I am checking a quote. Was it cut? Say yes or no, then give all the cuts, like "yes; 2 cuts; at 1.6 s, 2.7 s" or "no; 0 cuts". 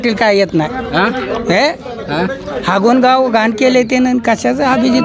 no; 0 cuts